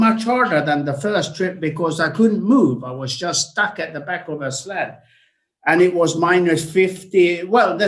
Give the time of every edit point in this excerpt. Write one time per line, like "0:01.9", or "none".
none